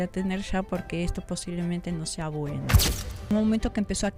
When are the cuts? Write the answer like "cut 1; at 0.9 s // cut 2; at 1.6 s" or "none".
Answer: cut 1; at 3.0 s